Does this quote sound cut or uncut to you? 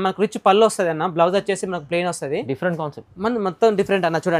uncut